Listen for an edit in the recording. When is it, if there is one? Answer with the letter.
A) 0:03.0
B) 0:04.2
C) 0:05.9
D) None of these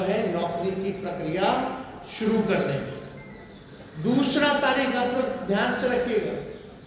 D